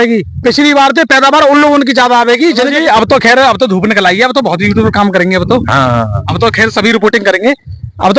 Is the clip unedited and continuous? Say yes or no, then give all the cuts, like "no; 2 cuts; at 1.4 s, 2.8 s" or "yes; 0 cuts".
no; 1 cut; at 2.7 s